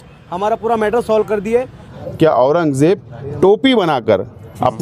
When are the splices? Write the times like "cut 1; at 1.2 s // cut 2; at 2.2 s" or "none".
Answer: cut 1; at 1.9 s